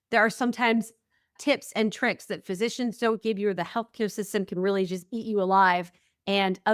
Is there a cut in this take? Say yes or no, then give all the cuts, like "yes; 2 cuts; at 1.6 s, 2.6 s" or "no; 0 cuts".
no; 0 cuts